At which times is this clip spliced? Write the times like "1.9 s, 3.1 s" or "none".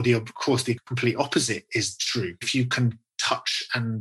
0.9 s, 2.4 s